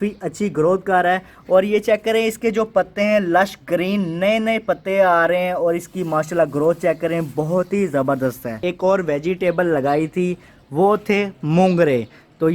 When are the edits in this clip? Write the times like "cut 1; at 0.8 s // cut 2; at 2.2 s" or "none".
cut 1; at 8.6 s

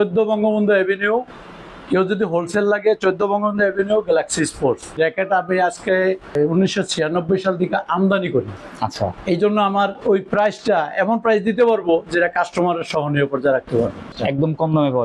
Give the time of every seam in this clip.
cut 1; at 5.0 s // cut 2; at 6.3 s // cut 3; at 8.6 s // cut 4; at 14.1 s

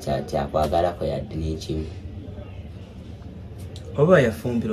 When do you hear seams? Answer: none

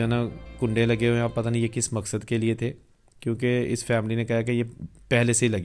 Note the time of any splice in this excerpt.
none

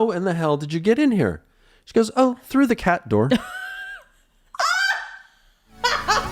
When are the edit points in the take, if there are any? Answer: none

